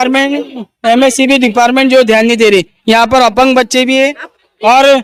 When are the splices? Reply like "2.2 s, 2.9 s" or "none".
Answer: none